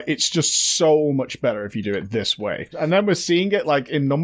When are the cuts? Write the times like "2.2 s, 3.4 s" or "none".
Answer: 2.7 s